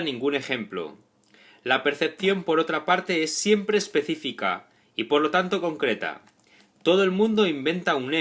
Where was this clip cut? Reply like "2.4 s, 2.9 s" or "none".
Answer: 3.6 s